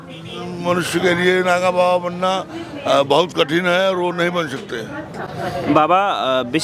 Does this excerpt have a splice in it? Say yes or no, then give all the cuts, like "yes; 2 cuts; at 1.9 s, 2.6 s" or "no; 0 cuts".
no; 0 cuts